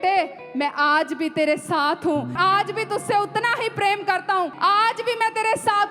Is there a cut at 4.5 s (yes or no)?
yes